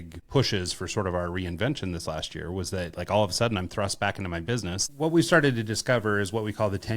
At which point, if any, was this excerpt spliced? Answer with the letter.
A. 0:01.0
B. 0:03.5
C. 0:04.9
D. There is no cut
C